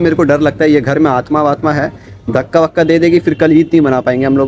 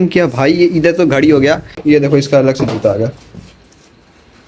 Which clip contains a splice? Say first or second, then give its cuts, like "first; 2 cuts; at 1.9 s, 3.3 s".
second; 1 cut; at 1.7 s